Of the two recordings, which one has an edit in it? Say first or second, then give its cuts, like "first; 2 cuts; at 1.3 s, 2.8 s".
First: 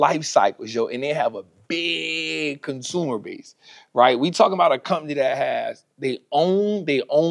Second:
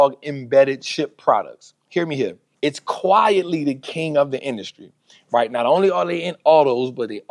second; 1 cut; at 2.4 s